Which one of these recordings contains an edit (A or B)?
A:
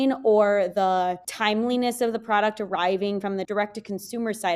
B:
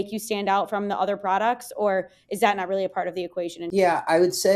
B